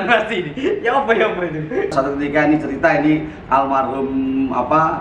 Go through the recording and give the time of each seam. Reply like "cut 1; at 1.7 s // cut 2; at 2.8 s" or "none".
cut 1; at 1.9 s